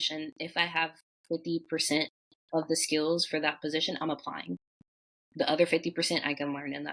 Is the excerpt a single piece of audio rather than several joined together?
yes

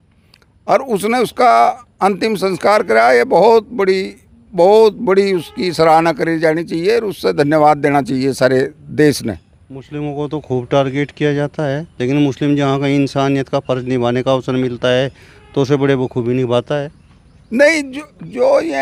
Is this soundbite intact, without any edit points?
yes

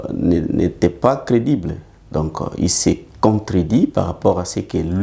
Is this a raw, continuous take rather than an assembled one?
yes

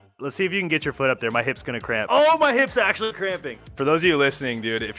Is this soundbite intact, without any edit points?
no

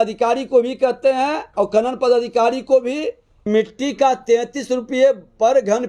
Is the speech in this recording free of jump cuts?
no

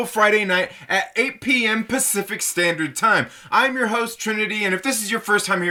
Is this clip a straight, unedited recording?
yes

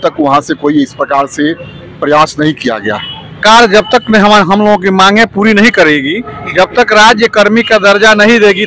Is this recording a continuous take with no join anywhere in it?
no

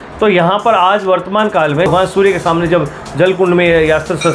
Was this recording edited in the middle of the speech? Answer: yes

